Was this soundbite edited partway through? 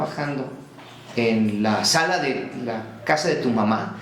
no; 0 cuts

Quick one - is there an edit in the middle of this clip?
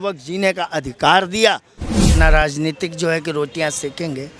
yes; 1 cut; at 2.1 s

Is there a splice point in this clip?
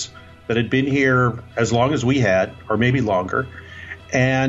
no; 0 cuts

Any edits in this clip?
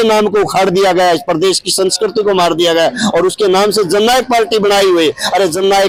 no; 0 cuts

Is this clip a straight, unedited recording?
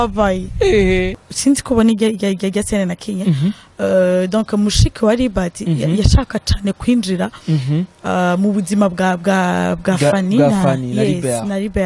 no; 1 cut; at 1.2 s

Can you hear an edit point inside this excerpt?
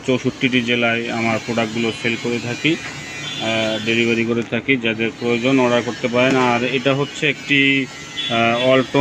no; 0 cuts

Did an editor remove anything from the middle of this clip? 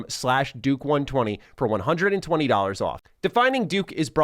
yes; 1 cut; at 3.0 s

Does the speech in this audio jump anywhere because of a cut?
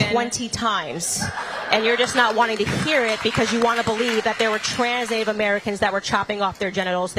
no; 0 cuts

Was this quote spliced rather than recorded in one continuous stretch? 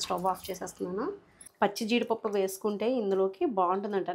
yes; 1 cut; at 1.4 s

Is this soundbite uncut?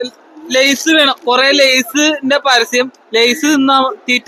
yes; 0 cuts

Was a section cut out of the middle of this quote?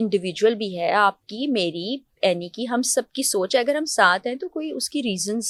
no; 0 cuts

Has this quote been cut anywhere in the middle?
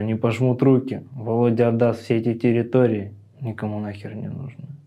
no; 0 cuts

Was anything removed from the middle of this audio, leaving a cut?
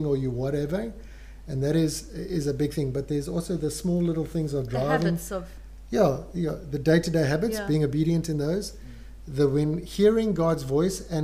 no; 0 cuts

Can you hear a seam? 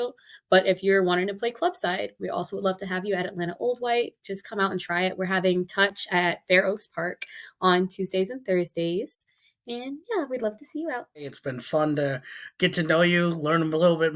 yes; 1 cut; at 11.3 s

